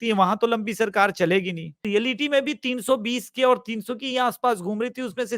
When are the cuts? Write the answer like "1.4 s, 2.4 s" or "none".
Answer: 1.8 s